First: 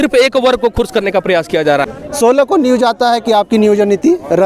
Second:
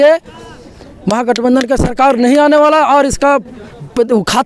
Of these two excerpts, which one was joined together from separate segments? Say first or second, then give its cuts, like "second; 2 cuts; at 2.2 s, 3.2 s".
first; 1 cut; at 1.9 s